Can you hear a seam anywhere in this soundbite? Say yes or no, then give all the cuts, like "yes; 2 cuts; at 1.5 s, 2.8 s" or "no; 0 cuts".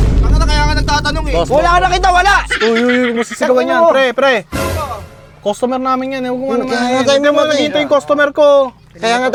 no; 0 cuts